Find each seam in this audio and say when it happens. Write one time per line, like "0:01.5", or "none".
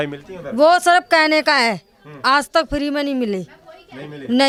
none